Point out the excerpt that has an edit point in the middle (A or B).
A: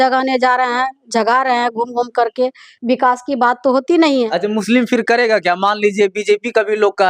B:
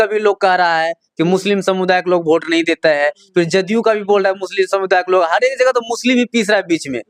A